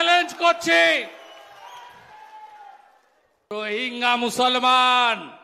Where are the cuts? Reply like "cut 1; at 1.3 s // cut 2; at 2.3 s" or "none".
cut 1; at 3.5 s